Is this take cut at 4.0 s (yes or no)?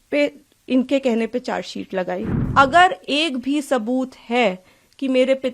no